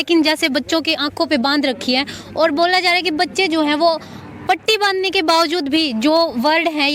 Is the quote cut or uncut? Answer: uncut